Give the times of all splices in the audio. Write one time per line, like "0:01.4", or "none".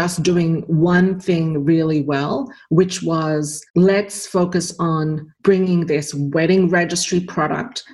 0:03.6
0:05.3